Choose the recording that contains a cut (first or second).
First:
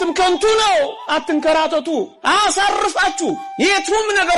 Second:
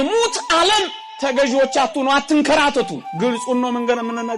first